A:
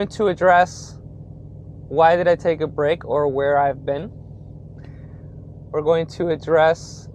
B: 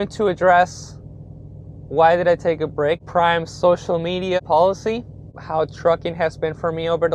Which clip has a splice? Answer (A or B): B